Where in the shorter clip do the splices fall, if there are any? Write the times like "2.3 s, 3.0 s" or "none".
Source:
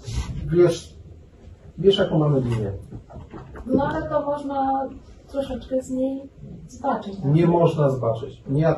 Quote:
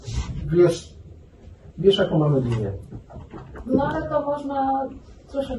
none